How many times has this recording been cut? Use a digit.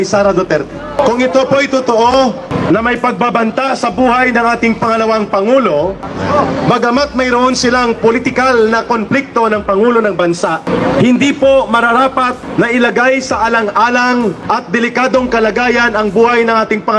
6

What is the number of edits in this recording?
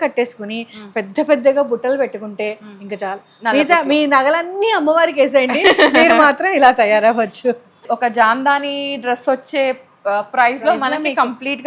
1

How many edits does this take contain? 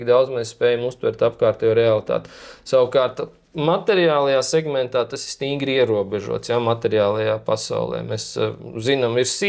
0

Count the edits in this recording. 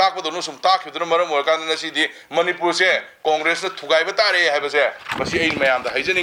0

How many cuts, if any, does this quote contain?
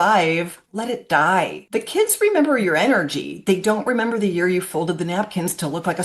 1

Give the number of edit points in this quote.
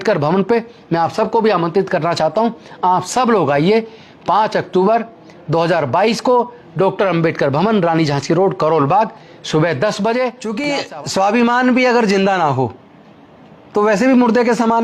1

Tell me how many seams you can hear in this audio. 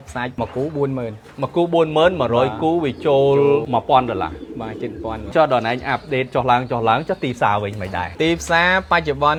0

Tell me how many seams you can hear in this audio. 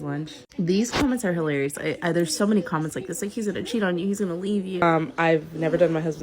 1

